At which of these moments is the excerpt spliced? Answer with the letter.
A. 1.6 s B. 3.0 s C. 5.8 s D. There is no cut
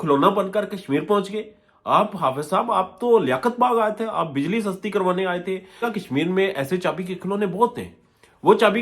C